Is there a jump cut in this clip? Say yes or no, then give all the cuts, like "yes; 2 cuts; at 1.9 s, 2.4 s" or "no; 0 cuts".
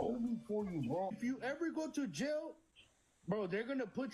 yes; 1 cut; at 1.0 s